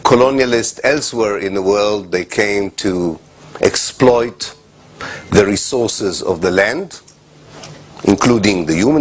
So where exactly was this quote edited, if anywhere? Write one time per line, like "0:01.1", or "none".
0:02.9